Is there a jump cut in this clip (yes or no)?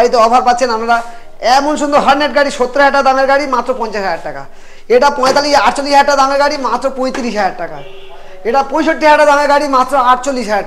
no